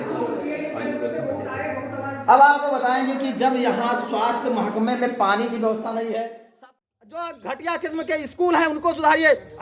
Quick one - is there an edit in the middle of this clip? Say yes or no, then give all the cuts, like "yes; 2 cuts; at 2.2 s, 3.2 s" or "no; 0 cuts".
yes; 1 cut; at 6.5 s